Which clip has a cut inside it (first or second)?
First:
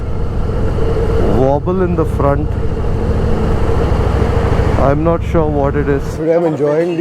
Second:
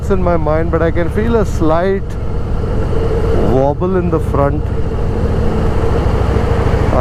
first